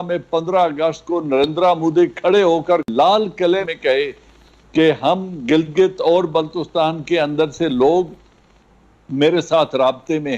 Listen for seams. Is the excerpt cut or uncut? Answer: cut